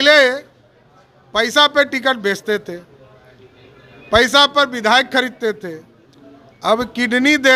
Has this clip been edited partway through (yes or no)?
no